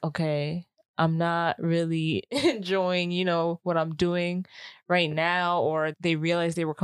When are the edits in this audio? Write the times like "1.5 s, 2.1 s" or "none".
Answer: 5.9 s